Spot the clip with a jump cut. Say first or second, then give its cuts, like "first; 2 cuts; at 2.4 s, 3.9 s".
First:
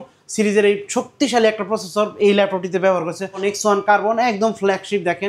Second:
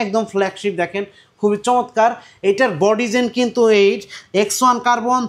first; 1 cut; at 3.4 s